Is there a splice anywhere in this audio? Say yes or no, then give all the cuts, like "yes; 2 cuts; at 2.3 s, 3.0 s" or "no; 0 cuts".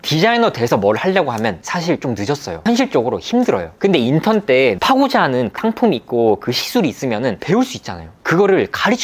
no; 0 cuts